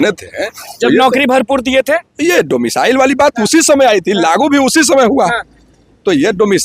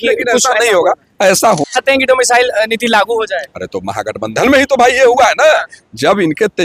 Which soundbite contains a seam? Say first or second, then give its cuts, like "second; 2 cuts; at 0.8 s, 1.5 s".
second; 1 cut; at 1.7 s